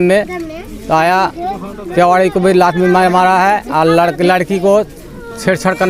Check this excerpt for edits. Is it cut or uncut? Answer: uncut